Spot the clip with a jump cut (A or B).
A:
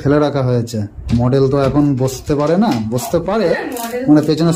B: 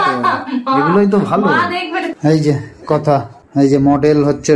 B